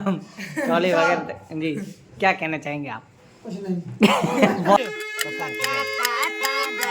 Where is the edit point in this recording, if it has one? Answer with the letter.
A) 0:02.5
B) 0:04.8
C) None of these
B